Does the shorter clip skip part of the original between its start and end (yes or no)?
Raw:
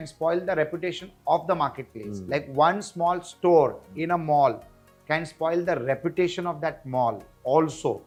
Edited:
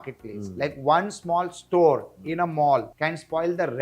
yes